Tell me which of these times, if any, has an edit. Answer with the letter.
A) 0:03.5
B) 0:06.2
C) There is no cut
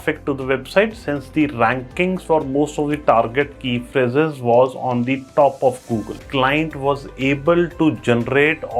B